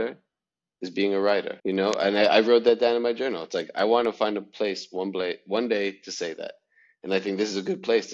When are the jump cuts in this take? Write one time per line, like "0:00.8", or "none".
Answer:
0:01.5